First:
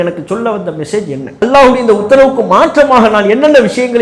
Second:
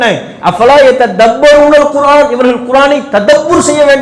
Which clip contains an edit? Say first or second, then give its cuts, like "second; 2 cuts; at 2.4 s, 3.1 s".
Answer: first; 1 cut; at 1.4 s